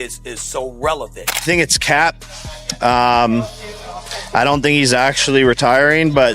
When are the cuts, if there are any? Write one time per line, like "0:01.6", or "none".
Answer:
0:01.3